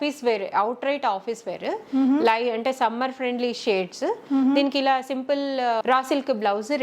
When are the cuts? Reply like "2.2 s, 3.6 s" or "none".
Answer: 5.8 s